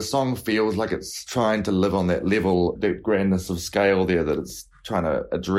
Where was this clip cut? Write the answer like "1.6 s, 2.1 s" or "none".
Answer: 1.2 s, 2.9 s